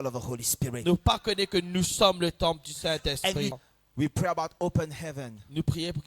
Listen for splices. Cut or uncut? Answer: cut